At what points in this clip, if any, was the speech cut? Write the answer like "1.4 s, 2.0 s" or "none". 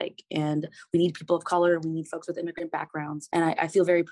3.2 s

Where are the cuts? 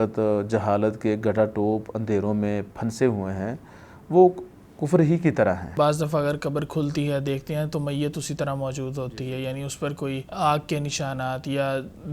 5.7 s, 10.3 s

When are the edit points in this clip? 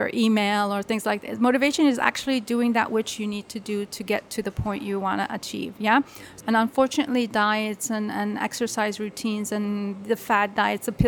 6.2 s

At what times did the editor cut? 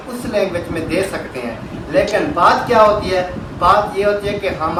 none

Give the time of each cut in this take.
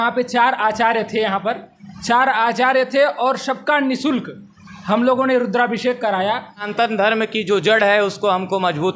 6.6 s

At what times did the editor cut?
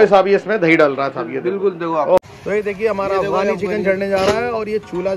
2.2 s

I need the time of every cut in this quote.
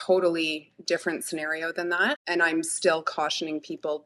2.2 s

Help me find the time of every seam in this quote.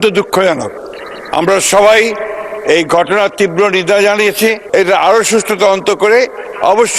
4.6 s

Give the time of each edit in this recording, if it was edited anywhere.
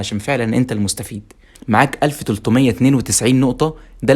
1.5 s

